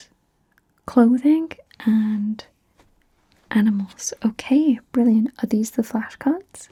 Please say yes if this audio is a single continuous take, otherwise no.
yes